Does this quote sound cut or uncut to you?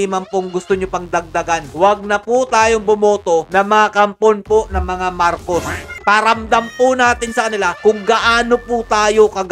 uncut